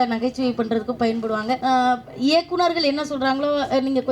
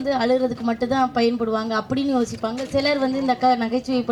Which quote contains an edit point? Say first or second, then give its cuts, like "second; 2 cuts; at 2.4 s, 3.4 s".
first; 1 cut; at 1.6 s